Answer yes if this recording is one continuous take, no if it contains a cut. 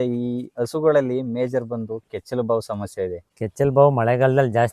no